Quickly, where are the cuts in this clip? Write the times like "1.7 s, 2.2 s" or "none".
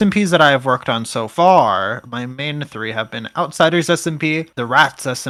none